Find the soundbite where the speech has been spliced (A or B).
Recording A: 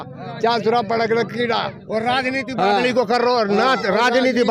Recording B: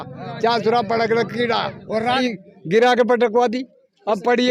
B